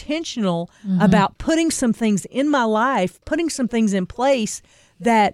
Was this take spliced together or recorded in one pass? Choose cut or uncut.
uncut